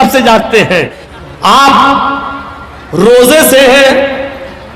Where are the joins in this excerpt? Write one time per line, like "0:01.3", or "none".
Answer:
0:01.0